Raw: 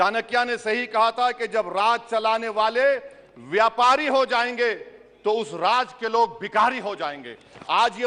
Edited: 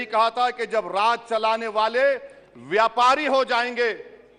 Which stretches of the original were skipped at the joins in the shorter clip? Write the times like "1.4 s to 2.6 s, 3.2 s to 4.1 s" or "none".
none